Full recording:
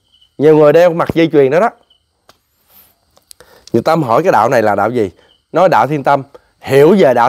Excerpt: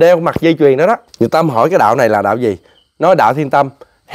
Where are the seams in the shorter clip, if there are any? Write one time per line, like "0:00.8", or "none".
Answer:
0:01.1